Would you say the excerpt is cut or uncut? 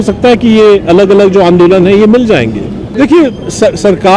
cut